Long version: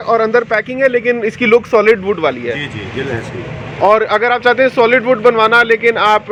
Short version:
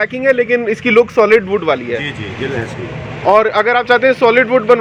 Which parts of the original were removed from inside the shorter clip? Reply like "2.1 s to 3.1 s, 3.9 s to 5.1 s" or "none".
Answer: none